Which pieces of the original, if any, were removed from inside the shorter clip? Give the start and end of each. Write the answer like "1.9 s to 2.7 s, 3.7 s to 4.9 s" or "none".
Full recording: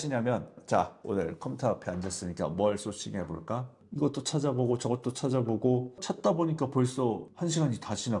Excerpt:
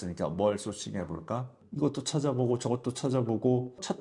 none